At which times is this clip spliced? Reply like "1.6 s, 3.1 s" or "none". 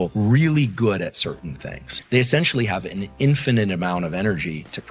1.9 s